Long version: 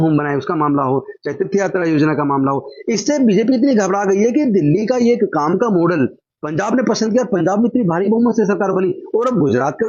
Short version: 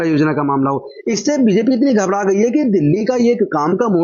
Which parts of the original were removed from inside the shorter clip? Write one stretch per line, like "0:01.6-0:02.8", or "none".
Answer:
none